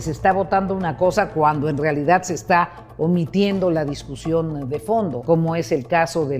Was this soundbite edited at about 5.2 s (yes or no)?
yes